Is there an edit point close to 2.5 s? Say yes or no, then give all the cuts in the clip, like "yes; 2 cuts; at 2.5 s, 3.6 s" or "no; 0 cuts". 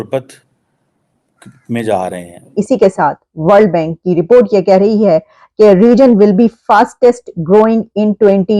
yes; 1 cut; at 2.5 s